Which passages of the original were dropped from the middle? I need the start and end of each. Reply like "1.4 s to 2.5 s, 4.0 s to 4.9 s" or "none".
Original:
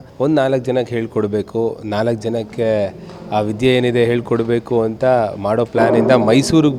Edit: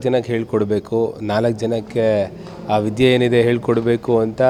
none